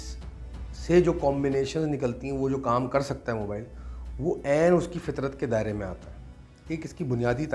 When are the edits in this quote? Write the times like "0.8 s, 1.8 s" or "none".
none

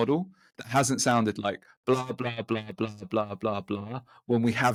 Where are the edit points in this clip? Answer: none

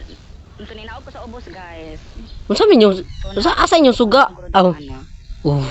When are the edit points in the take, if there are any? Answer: none

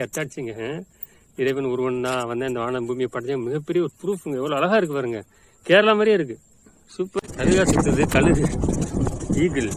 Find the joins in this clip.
7.3 s

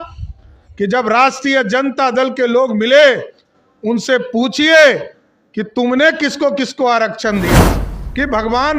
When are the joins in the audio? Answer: 7.6 s

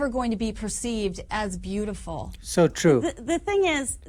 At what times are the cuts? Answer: none

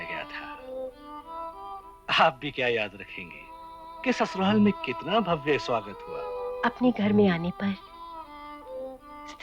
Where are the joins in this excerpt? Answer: 6.5 s

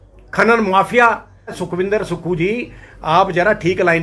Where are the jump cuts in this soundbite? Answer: 1.6 s

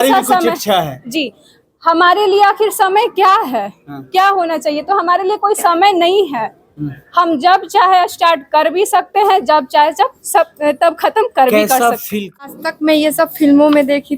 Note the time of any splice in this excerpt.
12.5 s

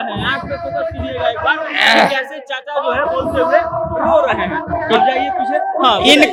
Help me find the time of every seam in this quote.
none

